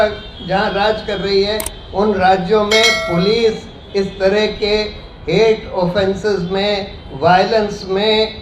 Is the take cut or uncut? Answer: uncut